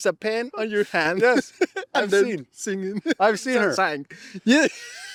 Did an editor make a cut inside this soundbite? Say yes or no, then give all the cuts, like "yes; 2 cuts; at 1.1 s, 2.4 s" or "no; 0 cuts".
no; 0 cuts